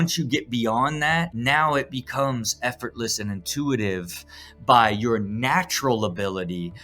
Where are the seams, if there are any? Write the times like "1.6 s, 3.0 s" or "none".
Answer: 1.3 s

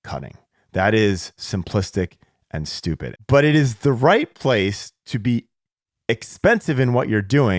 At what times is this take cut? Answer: 3.1 s

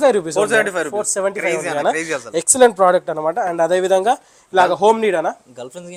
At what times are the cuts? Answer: none

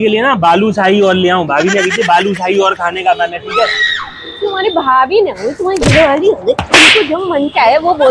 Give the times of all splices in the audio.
none

